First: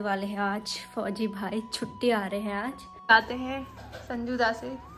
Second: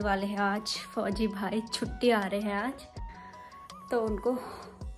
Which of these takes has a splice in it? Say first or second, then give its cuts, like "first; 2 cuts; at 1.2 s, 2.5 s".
first; 1 cut; at 3.0 s